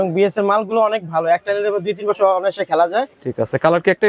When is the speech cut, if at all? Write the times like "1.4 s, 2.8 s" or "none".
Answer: 3.2 s